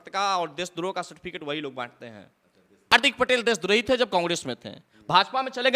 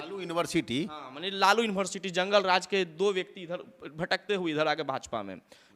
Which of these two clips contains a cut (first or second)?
first